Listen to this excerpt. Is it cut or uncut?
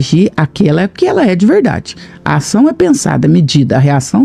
uncut